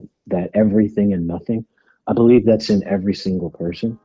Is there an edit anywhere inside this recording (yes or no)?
no